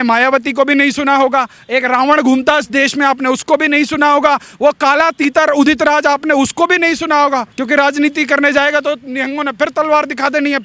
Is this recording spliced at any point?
yes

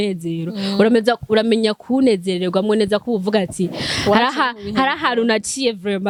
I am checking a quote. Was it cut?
no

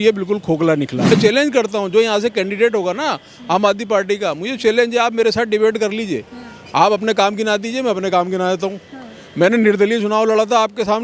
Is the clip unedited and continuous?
no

